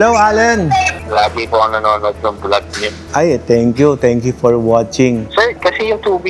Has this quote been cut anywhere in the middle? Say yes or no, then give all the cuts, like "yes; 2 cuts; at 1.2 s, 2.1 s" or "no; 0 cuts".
yes; 2 cuts; at 0.9 s, 5.2 s